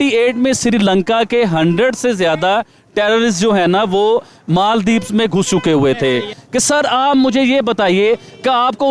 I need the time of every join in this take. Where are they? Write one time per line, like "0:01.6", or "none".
0:06.4